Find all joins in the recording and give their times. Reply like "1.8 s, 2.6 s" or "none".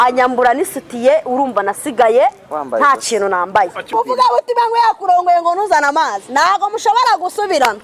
3.9 s